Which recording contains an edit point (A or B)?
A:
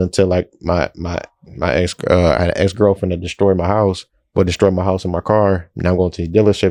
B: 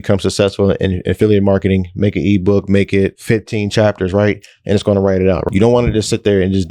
B